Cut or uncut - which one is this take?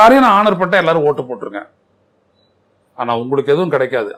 uncut